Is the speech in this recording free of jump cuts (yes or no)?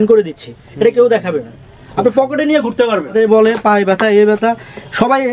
no